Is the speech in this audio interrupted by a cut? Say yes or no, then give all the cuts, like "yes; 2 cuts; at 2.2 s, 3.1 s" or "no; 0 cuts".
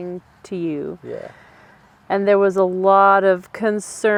no; 0 cuts